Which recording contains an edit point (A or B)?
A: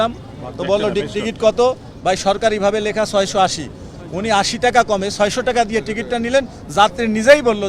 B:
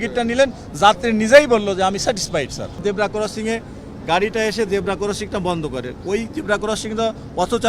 B